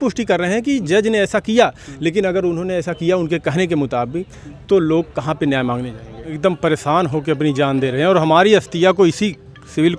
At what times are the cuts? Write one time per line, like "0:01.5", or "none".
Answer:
0:06.4